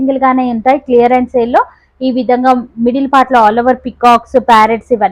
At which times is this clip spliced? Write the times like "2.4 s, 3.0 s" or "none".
none